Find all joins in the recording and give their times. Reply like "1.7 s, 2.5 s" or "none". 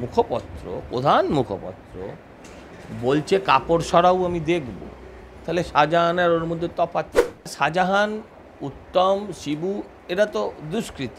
7.5 s